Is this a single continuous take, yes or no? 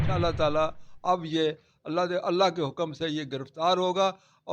yes